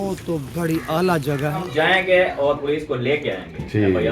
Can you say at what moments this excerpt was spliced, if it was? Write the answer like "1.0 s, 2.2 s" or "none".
1.6 s

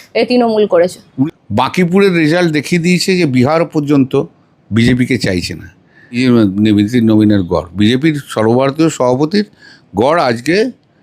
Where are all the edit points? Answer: 1.1 s, 6.2 s

